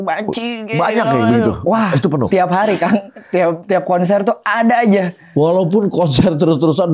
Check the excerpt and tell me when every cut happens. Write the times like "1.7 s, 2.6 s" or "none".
none